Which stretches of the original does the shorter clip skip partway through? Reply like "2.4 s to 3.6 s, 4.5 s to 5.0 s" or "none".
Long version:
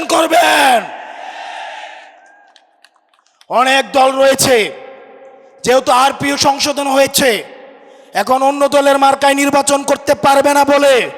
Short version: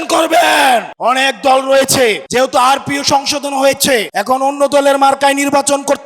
0.9 s to 3.4 s, 4.7 s to 5.6 s, 7.4 s to 8.1 s